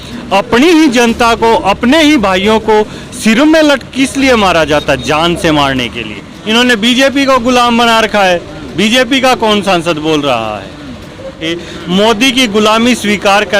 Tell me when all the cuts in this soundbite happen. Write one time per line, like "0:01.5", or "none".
0:06.3
0:11.4